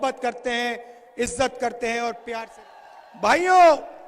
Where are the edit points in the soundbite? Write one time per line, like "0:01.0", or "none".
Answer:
0:02.5